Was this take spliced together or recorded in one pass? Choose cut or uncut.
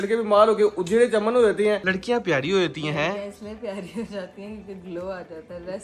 uncut